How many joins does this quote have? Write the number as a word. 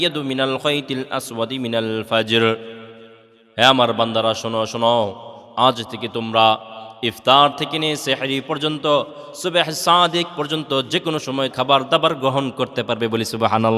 one